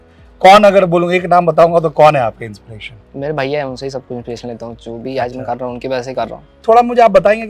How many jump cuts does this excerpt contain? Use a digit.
1